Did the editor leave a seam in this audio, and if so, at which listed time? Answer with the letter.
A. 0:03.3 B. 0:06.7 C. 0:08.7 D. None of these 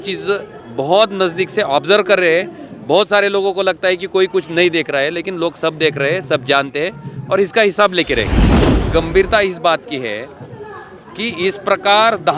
C